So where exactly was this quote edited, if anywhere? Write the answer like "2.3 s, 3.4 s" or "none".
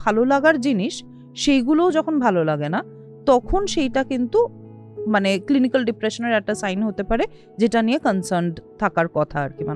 none